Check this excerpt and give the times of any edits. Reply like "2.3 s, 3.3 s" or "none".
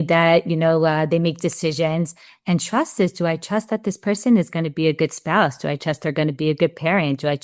none